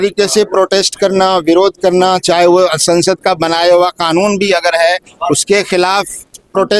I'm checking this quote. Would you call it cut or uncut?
uncut